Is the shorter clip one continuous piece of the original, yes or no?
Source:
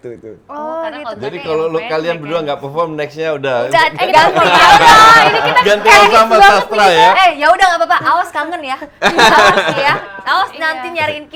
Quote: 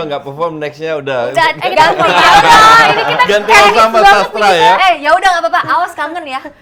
yes